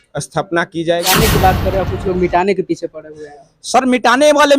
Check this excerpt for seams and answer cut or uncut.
cut